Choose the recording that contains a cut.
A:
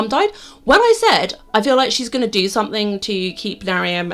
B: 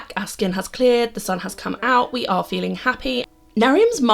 B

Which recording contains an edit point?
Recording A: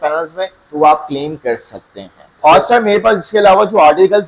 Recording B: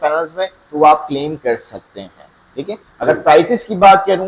A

